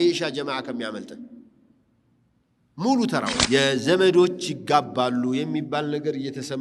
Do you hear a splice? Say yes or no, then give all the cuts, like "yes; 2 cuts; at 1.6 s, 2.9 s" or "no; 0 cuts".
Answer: yes; 1 cut; at 3.4 s